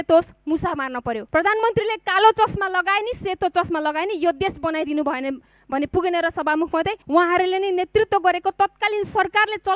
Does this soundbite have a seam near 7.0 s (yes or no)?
yes